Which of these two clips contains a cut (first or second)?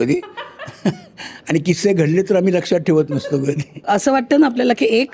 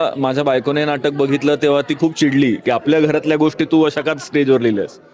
first